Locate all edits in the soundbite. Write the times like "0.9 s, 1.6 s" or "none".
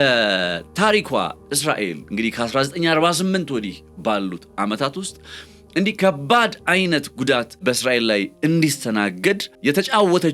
7.6 s, 9.5 s